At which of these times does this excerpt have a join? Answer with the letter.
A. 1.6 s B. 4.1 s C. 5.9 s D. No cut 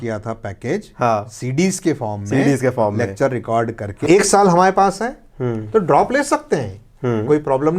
B